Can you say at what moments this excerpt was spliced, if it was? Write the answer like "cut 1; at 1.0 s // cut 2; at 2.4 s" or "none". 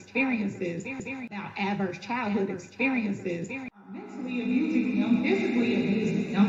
none